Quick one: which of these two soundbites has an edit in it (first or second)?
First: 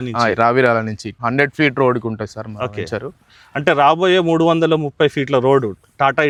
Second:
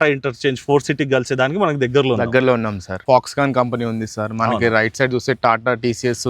second